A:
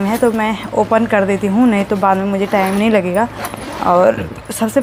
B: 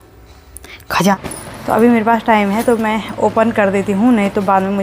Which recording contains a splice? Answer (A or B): B